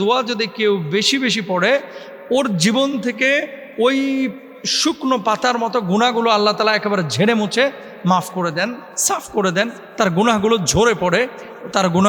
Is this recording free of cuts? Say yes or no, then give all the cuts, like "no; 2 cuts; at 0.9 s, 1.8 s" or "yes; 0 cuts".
yes; 0 cuts